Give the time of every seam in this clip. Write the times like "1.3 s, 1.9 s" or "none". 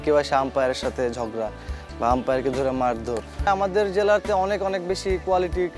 3.5 s

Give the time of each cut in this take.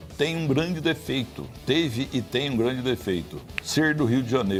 none

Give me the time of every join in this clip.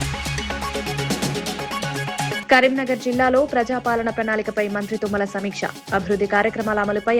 2.4 s

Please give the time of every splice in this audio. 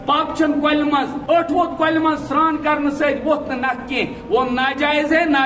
1.2 s

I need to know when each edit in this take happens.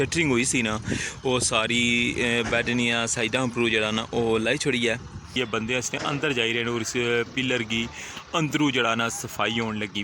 5.3 s

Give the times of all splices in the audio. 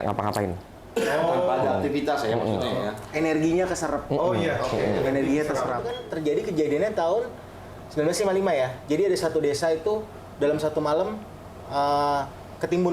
6.0 s

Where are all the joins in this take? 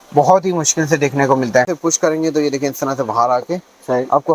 1.7 s

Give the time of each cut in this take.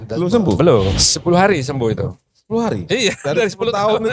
0.9 s

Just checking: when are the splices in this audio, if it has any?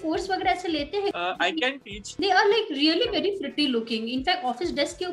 2.1 s

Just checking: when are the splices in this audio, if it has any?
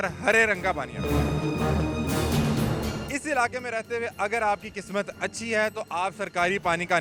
none

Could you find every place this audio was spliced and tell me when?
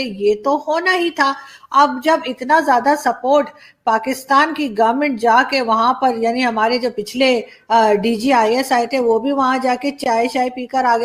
none

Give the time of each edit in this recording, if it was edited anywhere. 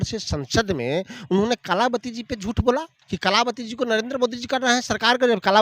3.0 s

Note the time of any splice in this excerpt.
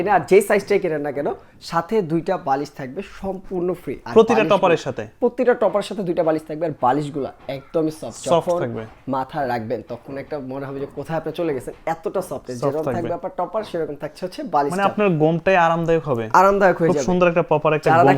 none

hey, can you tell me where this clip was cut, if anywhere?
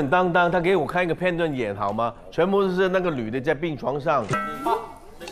4.3 s

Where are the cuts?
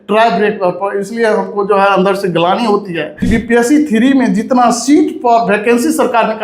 3.3 s

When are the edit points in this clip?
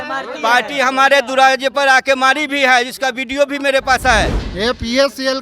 4.4 s

